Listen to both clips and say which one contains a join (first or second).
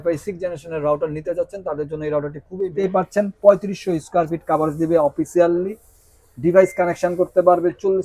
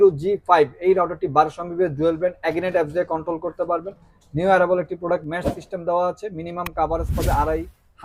first